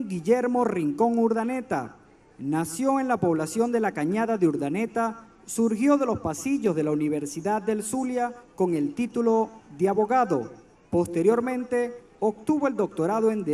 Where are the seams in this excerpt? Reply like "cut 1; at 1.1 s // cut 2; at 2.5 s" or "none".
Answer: none

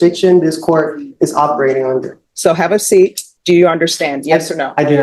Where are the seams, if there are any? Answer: cut 1; at 2.2 s // cut 2; at 3.3 s

